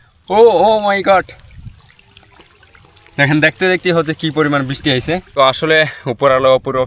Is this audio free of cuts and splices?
no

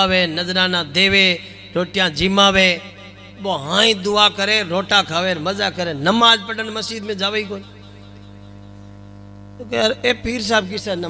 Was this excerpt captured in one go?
yes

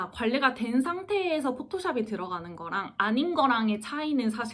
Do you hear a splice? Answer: no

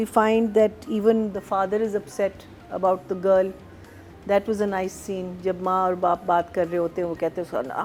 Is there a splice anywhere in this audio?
no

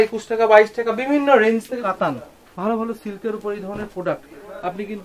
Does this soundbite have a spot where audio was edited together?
yes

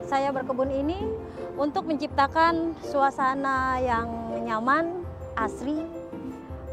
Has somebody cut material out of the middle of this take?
no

